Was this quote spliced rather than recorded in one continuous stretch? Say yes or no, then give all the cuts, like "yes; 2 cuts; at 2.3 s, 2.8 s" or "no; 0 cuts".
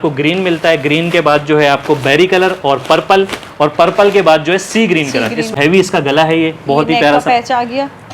yes; 1 cut; at 5.5 s